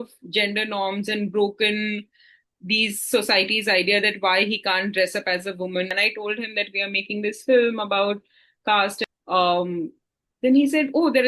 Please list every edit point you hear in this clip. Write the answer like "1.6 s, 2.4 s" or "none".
5.9 s, 9.0 s